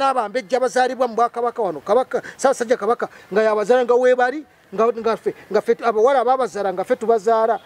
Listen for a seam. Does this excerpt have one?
no; 0 cuts

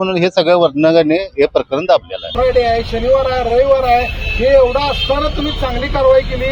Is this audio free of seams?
no; 1 cut; at 2.3 s

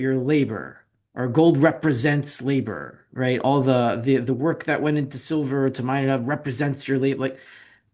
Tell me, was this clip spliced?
no; 0 cuts

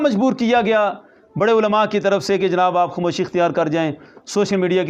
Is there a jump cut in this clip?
no; 0 cuts

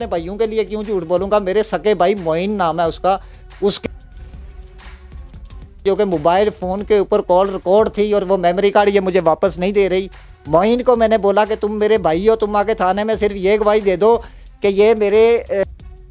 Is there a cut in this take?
no; 0 cuts

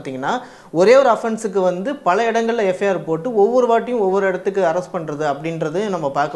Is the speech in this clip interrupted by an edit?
no; 0 cuts

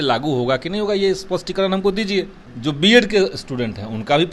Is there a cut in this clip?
yes; 1 cut; at 2.4 s

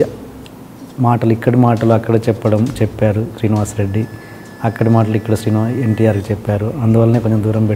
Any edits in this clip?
no; 0 cuts

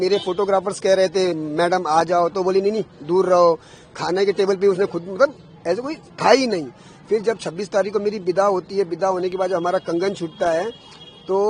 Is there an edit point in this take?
no; 0 cuts

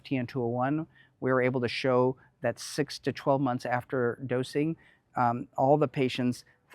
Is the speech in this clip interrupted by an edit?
no; 0 cuts

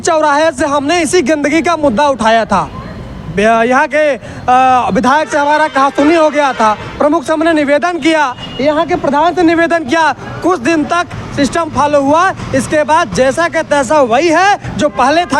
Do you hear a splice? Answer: no; 0 cuts

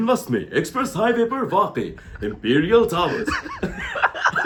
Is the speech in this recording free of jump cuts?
yes; 0 cuts

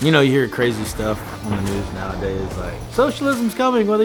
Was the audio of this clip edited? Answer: no; 0 cuts

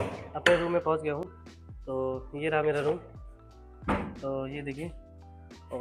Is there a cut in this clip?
no; 0 cuts

